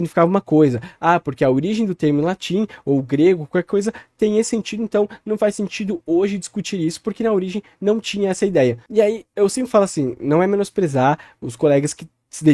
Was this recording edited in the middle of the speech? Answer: no; 0 cuts

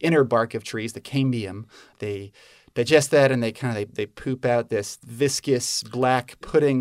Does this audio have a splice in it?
yes; 2 cuts; at 1.9 s, 5.0 s

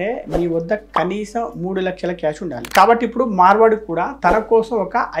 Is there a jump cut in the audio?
yes; 1 cut; at 2.7 s

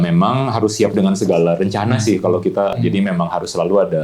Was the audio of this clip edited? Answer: yes; 1 cut; at 2.7 s

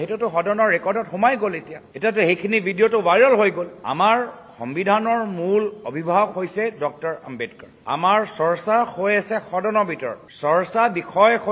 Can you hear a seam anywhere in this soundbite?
no; 0 cuts

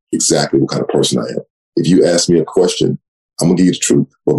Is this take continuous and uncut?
no; 1 cut; at 3.2 s

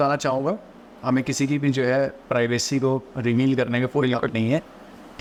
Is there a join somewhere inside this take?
no; 0 cuts

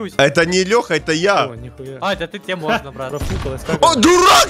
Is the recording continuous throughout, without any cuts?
no; 1 cut; at 3.1 s

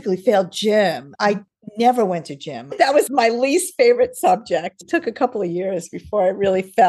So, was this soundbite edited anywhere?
yes; 3 cuts; at 1.1 s, 3.1 s, 4.7 s

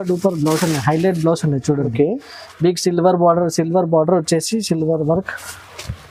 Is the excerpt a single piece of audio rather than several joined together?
yes; 0 cuts

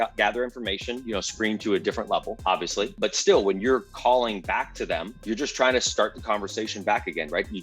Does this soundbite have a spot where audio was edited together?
yes; 2 cuts; at 2.9 s, 5.1 s

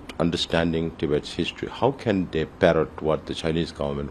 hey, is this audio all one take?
yes; 0 cuts

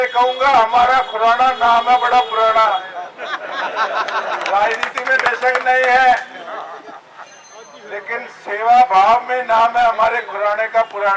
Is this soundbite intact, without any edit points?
yes; 0 cuts

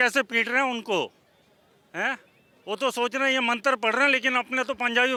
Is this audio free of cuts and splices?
yes; 0 cuts

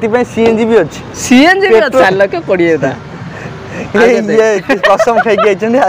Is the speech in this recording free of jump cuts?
no; 1 cut; at 2.0 s

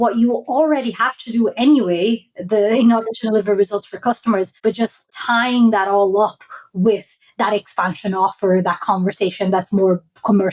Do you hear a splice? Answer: yes; 1 cut; at 4.8 s

